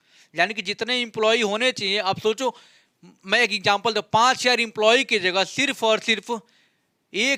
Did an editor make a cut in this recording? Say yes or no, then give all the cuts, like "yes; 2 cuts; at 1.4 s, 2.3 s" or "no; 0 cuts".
no; 0 cuts